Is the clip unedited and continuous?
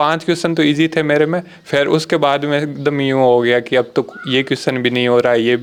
yes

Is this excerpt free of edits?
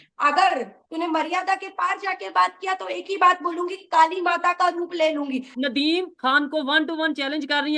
no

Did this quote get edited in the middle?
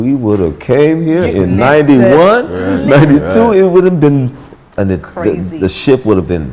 no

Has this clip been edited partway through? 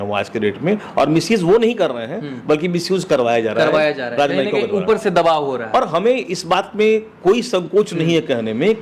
no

